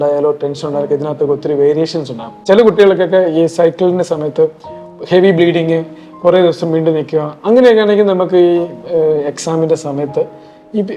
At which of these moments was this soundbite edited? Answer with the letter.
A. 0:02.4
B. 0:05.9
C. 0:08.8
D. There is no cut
A